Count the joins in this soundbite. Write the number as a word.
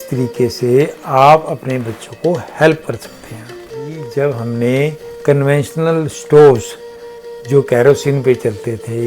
one